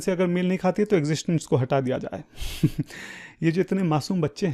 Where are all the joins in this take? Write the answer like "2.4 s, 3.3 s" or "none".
none

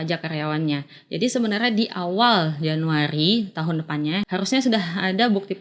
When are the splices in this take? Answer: 4.3 s

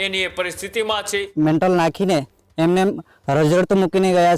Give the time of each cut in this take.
1.3 s

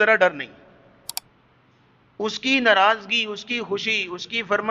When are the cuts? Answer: 1.2 s

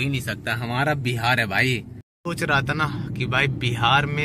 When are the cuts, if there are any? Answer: 2.2 s

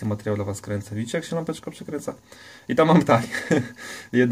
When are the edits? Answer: none

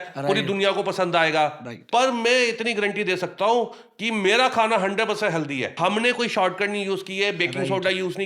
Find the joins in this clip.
1.7 s, 5.8 s

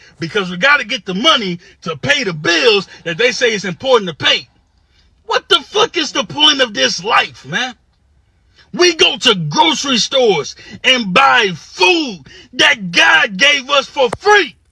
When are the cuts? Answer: 11.1 s

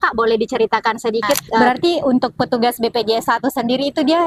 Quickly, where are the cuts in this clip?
1.6 s

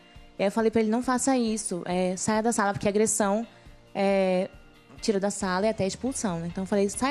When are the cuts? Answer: 1.7 s

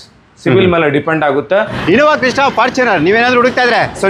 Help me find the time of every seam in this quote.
1.6 s

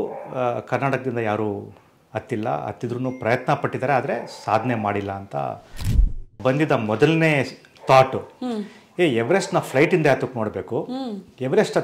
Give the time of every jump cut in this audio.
6.2 s

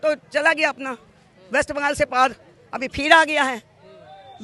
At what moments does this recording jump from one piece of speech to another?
none

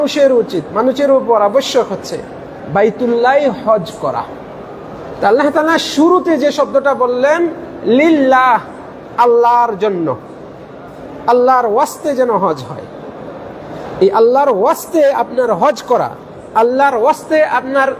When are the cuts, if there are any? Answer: none

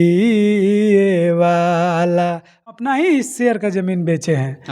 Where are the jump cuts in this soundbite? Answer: 2.7 s

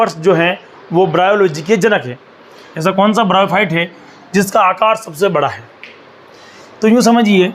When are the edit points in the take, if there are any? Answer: 2.7 s

